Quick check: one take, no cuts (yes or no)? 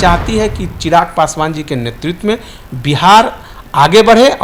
yes